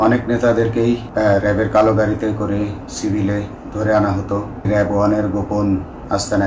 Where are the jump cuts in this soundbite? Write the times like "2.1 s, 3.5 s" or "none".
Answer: 1.1 s, 4.7 s